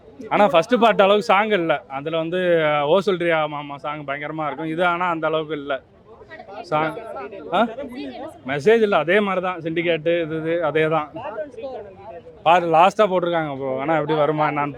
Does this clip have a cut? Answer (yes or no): no